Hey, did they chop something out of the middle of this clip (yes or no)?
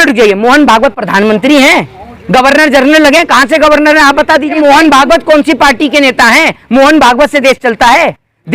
yes